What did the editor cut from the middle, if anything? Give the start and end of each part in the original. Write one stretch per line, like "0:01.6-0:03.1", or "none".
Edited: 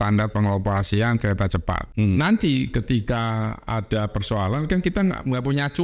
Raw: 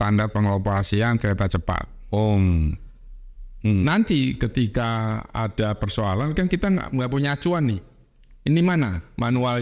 0:01.9-0:03.5